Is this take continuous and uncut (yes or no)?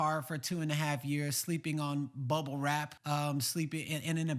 no